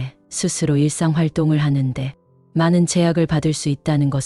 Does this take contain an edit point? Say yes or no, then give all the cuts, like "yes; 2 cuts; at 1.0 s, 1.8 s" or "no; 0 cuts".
no; 0 cuts